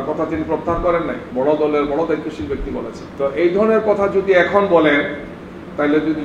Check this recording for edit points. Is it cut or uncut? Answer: cut